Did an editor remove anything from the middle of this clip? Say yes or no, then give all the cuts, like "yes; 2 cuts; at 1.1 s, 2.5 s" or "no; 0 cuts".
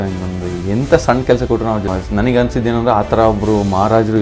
yes; 1 cut; at 1.9 s